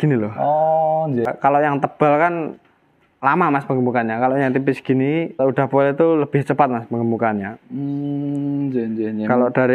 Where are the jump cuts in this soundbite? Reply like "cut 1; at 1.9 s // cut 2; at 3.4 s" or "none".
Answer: cut 1; at 1.3 s // cut 2; at 5.4 s